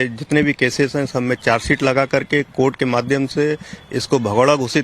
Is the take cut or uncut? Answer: cut